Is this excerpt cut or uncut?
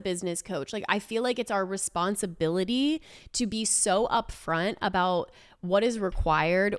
uncut